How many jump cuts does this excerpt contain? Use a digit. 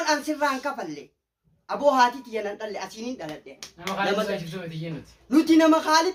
0